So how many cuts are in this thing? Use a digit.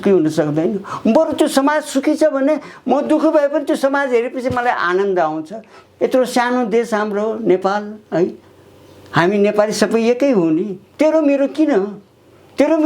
1